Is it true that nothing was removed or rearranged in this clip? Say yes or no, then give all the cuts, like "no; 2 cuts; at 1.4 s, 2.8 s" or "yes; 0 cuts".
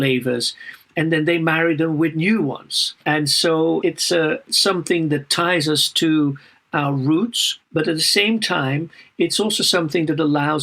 no; 1 cut; at 2.9 s